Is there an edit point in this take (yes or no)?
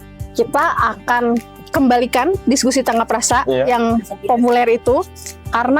no